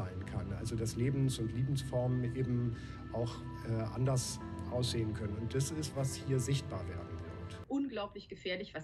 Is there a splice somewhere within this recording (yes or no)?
yes